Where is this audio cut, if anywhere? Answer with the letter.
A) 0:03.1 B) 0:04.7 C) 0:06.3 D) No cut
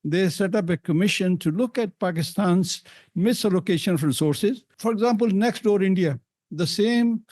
B